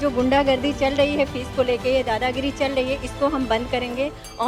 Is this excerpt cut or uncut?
uncut